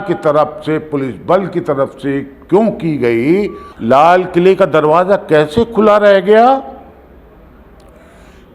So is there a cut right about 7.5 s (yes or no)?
no